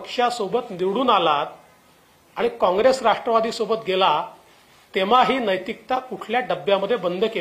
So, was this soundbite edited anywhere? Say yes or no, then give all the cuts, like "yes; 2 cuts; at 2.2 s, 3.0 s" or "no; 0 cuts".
no; 0 cuts